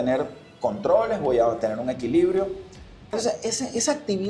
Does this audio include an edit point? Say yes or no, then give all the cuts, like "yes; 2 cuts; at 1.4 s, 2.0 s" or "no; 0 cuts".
yes; 1 cut; at 3.1 s